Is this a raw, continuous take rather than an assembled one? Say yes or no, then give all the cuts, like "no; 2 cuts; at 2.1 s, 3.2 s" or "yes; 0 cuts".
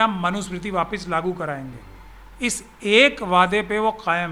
yes; 0 cuts